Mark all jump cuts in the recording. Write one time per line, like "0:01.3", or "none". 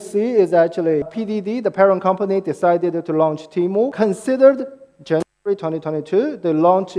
0:01.1
0:03.9

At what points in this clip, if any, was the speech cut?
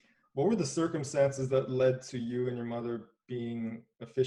none

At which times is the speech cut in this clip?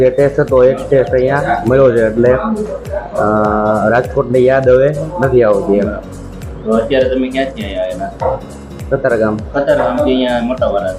none

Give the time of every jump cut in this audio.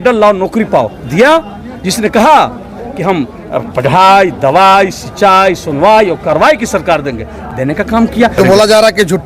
0:08.4

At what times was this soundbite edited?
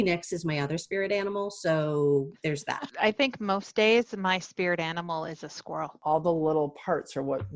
0:02.7
0:06.0

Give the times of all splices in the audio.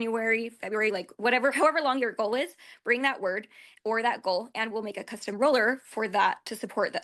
none

